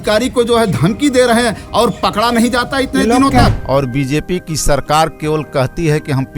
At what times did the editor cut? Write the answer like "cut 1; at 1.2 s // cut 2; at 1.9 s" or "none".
cut 1; at 3.5 s